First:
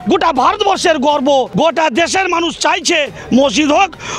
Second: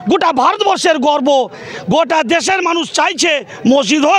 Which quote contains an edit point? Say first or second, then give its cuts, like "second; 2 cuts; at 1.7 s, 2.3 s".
first; 1 cut; at 1.5 s